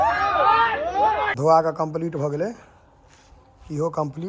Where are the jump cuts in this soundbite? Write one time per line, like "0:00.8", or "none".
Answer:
0:01.3